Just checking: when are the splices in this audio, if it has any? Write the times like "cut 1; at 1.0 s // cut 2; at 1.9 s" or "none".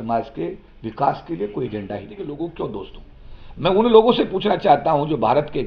cut 1; at 2.1 s